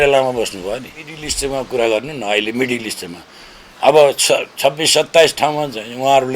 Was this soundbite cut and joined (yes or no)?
yes